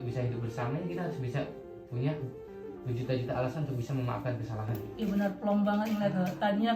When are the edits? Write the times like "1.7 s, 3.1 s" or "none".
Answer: 4.8 s